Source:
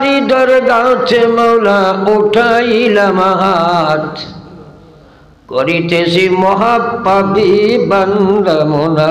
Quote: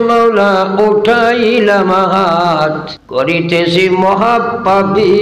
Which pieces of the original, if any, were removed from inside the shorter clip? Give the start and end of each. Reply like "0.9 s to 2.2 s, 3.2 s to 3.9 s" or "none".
4.2 s to 5.3 s